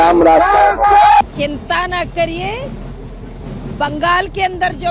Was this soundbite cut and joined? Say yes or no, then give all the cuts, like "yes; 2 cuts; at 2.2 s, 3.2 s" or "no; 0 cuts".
yes; 1 cut; at 1.2 s